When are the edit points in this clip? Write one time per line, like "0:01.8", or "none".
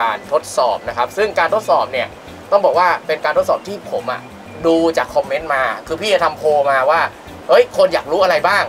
none

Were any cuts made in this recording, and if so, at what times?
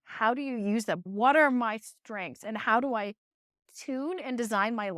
0:01.0
0:03.6

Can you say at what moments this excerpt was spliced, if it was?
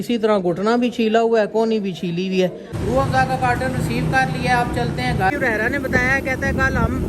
0:02.7
0:05.3

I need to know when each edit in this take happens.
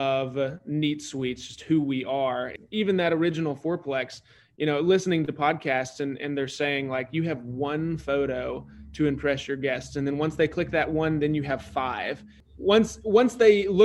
0:02.6
0:12.4

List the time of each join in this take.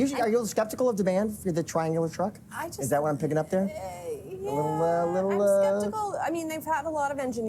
none

